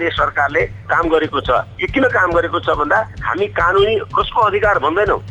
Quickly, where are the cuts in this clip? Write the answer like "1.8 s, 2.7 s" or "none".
none

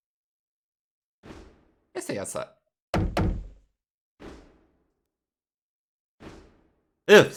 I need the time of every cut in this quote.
none

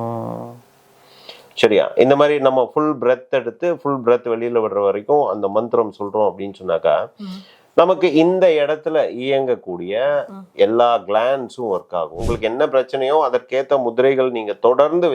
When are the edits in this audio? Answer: 12.2 s

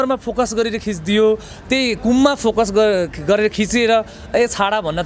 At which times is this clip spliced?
none

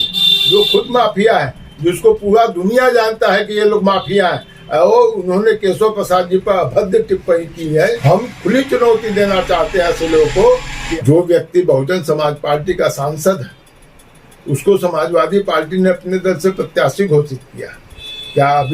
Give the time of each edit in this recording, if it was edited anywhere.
8.0 s, 10.8 s

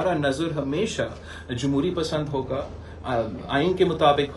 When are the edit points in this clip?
none

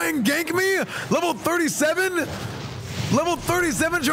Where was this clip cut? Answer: none

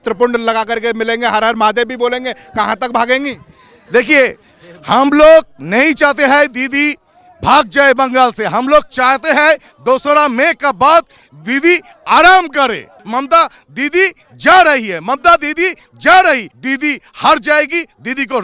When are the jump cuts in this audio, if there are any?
13.0 s, 16.5 s

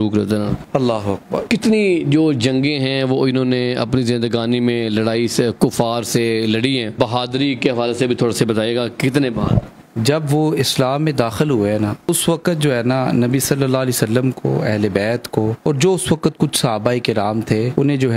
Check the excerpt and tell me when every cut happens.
1.4 s, 6.9 s, 9.8 s

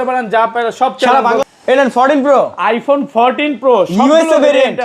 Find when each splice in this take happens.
1.4 s

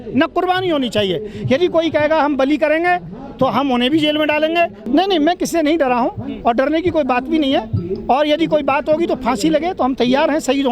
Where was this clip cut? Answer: 4.8 s

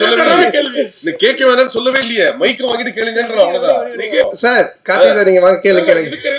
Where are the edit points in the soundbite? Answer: 4.3 s

